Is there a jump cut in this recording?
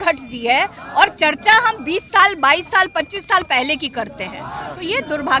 no; 0 cuts

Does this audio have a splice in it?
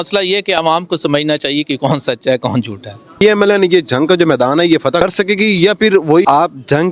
yes; 3 cuts; at 3.2 s, 5.0 s, 6.2 s

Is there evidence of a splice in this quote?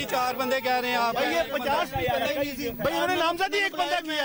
no; 0 cuts

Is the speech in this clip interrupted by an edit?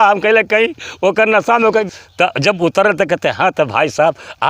yes; 1 cut; at 1.9 s

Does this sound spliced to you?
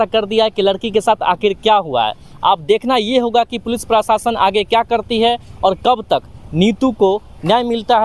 no; 0 cuts

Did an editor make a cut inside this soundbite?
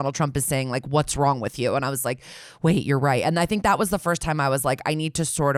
no; 0 cuts

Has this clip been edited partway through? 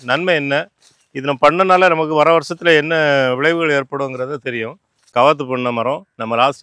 yes; 1 cut; at 5.1 s

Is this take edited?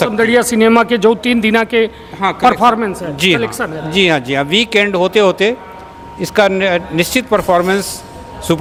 no; 0 cuts

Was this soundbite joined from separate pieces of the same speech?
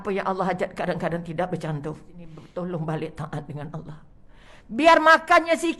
yes; 1 cut; at 2.4 s

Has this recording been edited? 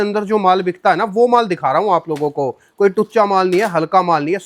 no; 0 cuts

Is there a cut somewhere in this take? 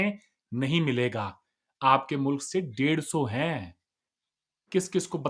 no; 0 cuts

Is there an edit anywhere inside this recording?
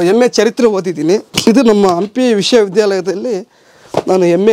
yes; 1 cut; at 1.3 s

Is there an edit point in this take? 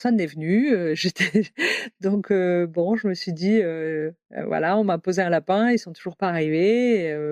no; 0 cuts

